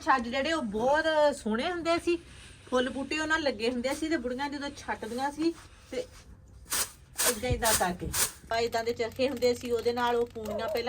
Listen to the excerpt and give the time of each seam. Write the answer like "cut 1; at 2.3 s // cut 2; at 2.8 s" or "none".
cut 1; at 8.5 s